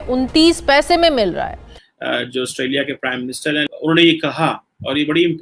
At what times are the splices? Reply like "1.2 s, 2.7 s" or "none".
1.6 s, 3.7 s